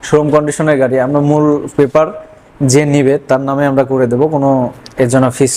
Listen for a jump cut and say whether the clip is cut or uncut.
uncut